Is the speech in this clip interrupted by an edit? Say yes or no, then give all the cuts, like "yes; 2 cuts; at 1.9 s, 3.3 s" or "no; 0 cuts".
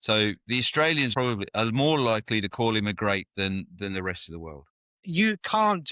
yes; 2 cuts; at 1.1 s, 5.0 s